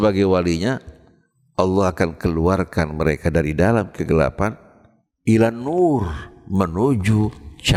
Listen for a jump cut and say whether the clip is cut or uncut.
uncut